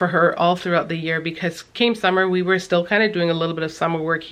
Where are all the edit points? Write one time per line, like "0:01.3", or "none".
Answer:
none